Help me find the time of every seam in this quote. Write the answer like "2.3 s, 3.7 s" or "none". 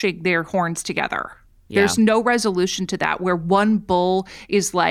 none